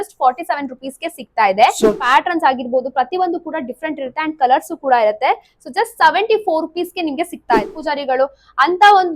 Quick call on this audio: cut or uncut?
cut